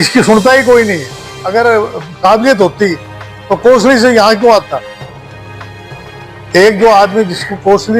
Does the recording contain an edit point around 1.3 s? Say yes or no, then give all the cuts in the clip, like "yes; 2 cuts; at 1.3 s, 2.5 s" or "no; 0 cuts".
yes; 1 cut; at 1.3 s